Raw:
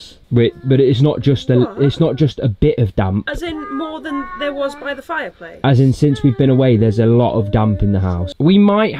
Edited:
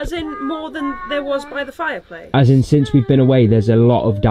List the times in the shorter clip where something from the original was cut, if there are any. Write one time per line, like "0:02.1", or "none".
none